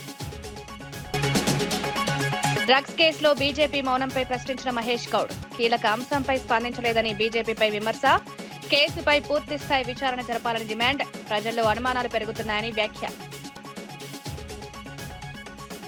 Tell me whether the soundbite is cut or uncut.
uncut